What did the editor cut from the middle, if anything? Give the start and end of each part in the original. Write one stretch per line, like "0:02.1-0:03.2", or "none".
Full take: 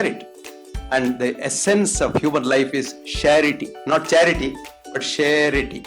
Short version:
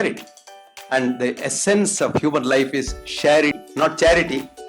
0:03.6-0:03.7